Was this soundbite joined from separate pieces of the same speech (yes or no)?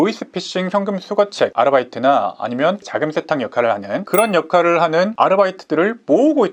no